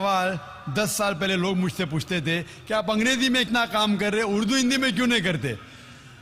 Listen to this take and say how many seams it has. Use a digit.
1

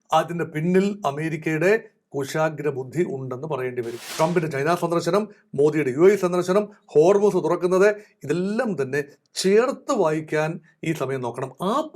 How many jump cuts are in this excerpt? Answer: 1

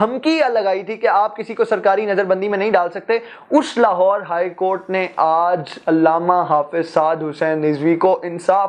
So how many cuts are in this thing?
0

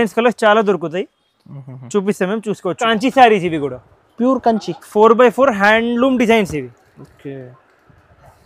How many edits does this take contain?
1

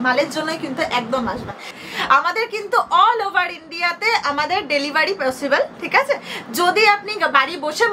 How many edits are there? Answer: 1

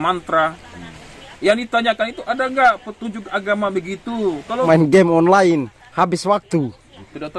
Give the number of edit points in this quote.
1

